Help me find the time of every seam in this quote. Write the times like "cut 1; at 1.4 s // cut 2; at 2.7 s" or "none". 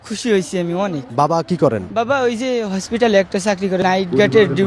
cut 1; at 1.0 s // cut 2; at 1.9 s // cut 3; at 3.8 s